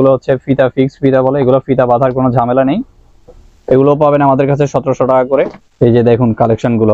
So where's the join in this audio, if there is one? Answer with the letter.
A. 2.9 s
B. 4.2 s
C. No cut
C